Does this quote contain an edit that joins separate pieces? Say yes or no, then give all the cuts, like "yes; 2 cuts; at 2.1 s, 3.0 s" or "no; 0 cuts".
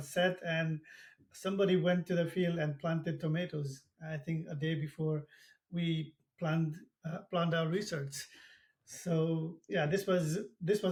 no; 0 cuts